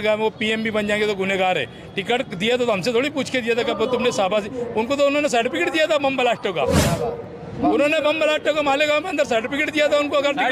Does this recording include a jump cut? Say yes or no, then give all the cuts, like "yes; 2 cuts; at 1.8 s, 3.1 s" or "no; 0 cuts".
no; 0 cuts